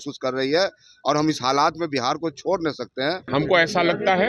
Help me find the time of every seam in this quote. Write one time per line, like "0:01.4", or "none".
0:03.2